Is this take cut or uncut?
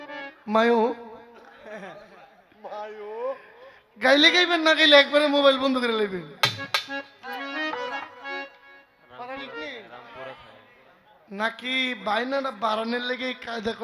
uncut